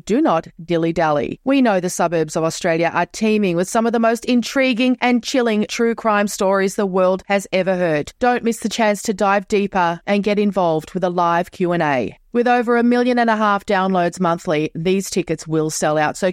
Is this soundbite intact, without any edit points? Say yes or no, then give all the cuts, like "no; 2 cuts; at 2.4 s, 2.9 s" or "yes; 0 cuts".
yes; 0 cuts